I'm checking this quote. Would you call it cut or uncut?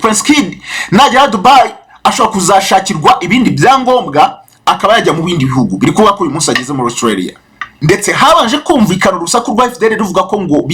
cut